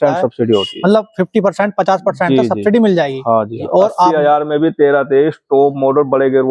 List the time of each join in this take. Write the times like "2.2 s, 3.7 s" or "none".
3.6 s